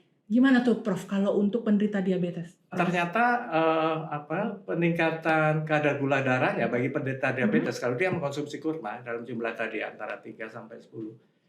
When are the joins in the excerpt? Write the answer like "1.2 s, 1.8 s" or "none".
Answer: 2.7 s